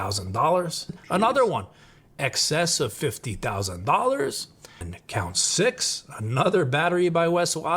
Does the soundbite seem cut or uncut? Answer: cut